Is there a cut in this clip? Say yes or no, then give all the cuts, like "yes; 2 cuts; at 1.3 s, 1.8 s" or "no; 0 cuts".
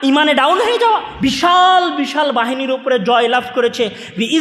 yes; 1 cut; at 1.1 s